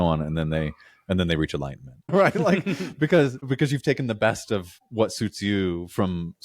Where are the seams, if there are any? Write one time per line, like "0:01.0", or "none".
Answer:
0:02.1
0:03.4
0:04.8